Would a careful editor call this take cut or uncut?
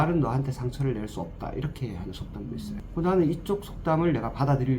cut